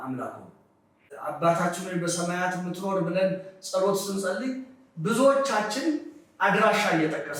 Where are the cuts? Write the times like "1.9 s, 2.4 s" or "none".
1.1 s